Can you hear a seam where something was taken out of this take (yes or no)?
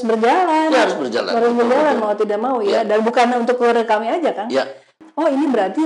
yes